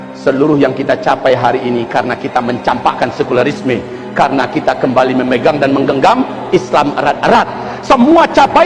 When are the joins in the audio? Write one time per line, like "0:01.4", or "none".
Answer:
none